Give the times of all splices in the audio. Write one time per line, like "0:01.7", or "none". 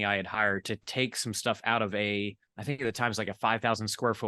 0:02.5